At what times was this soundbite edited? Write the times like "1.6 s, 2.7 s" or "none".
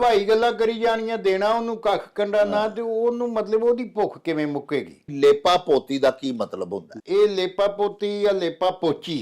5.1 s